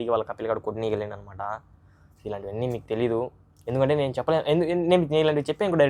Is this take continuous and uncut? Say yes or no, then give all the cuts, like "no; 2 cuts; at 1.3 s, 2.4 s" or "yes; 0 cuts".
yes; 0 cuts